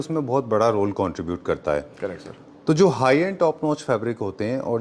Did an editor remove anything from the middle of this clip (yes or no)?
no